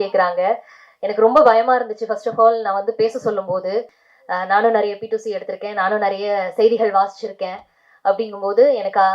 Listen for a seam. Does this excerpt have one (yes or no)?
yes